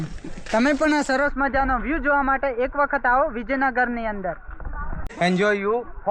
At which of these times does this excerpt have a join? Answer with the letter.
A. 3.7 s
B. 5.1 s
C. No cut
B